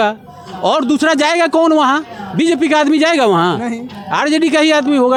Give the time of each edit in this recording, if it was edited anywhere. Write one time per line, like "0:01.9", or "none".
none